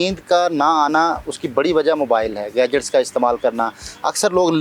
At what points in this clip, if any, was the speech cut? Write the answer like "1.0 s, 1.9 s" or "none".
none

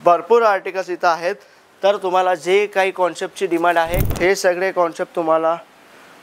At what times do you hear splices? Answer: 4.0 s

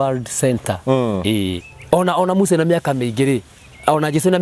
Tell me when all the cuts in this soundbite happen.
1.6 s

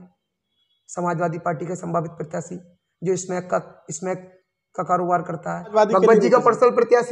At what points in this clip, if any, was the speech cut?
5.7 s

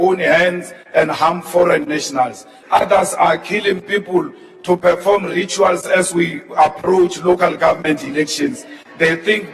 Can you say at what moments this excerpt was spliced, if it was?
2.5 s

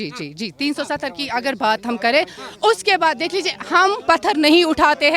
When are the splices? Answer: none

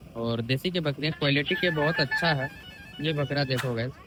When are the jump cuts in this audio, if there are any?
none

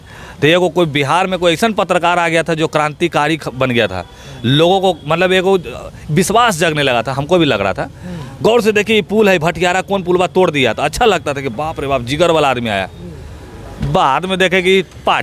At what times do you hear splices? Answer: none

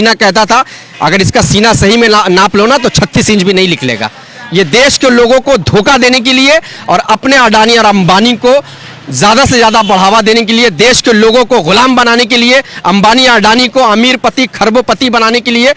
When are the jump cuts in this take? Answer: none

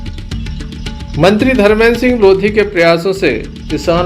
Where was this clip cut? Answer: 1.1 s

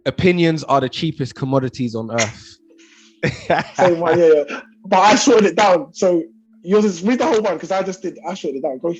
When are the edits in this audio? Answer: none

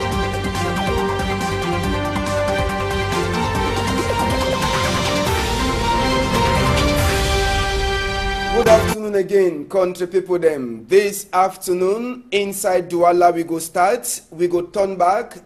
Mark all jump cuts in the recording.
none

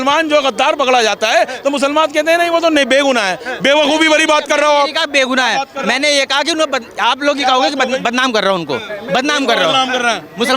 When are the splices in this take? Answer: none

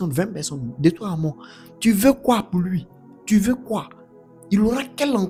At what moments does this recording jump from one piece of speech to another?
none

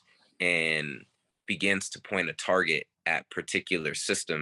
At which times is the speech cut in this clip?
none

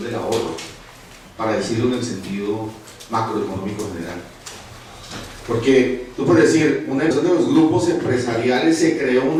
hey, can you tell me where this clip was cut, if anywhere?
none

